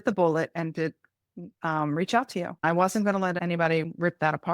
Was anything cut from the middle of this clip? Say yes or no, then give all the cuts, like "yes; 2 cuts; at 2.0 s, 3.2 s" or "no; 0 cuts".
yes; 2 cuts; at 2.6 s, 3.4 s